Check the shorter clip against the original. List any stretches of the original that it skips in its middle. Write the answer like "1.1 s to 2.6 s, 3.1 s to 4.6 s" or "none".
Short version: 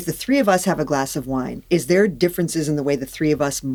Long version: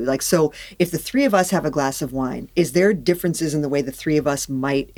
none